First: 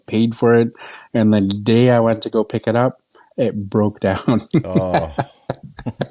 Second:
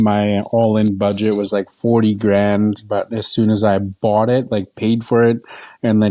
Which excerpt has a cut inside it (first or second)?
second